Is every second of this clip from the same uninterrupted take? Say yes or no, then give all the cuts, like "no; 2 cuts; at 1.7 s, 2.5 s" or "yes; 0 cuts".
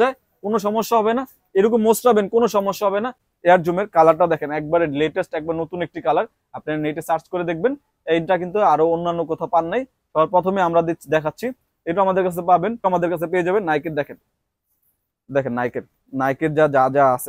no; 2 cuts; at 3.3 s, 12.9 s